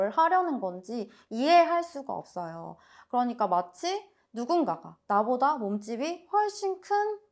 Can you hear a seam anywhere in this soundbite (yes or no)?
no